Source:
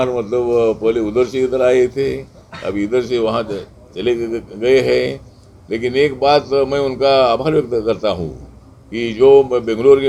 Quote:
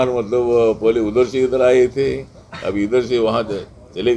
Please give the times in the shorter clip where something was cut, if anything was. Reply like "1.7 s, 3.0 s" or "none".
none